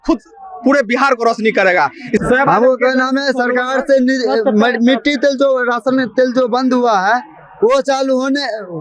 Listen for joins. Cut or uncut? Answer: cut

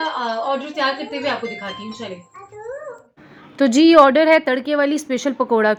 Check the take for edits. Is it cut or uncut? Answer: uncut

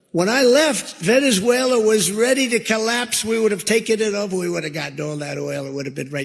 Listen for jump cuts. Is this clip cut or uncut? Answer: uncut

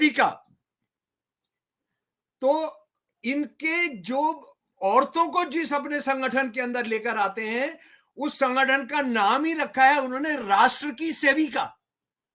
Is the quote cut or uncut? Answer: uncut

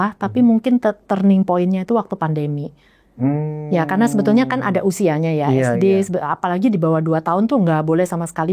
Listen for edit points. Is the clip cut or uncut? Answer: uncut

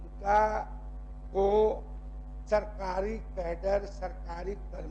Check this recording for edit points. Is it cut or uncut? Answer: uncut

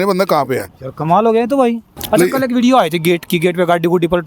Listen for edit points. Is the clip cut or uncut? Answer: cut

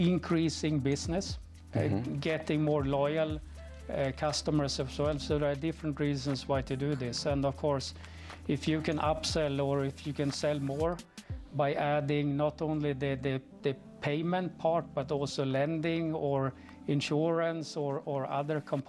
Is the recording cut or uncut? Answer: uncut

